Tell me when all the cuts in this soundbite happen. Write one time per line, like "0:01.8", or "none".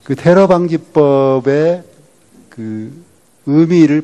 0:01.1